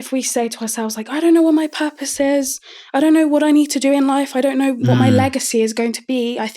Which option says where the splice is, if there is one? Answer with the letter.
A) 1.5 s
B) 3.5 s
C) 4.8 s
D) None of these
C